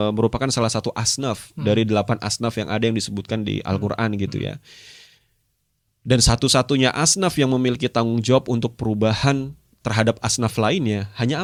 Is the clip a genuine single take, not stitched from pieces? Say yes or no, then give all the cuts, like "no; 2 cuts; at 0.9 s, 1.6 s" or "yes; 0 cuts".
yes; 0 cuts